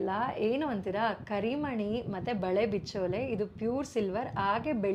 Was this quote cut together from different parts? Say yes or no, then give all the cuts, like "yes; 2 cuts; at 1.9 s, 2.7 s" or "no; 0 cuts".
no; 0 cuts